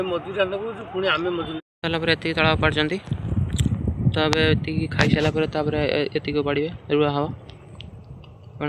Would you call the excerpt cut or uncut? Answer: cut